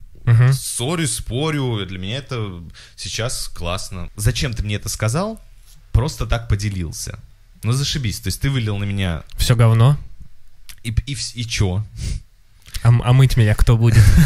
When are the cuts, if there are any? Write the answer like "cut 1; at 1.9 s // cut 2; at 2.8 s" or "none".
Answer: cut 1; at 4.1 s